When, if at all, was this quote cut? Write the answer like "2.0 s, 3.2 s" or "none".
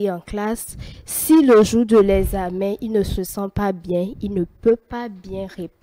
none